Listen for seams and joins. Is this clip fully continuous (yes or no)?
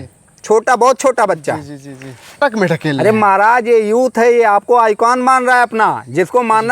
no